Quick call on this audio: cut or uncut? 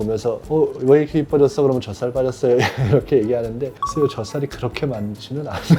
uncut